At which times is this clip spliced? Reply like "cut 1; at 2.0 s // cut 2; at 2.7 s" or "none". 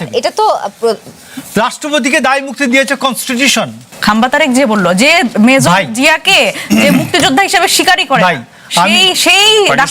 cut 1; at 3.8 s